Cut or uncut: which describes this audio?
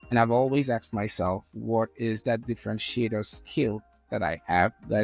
uncut